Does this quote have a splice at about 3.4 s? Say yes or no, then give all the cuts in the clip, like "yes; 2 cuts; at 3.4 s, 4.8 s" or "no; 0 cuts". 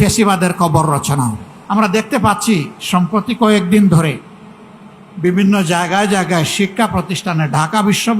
no; 1 cut; at 1.5 s